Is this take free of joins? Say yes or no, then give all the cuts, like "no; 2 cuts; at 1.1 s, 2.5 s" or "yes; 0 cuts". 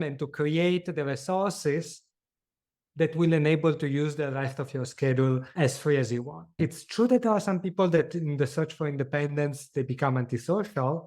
no; 2 cuts; at 5.5 s, 6.6 s